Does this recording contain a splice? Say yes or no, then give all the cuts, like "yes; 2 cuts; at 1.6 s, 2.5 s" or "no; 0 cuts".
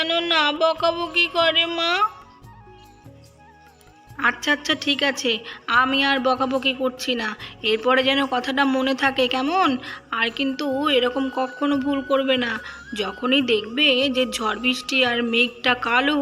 yes; 2 cuts; at 2.2 s, 3.7 s